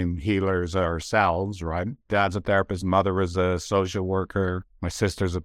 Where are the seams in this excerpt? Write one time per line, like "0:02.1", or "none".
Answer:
none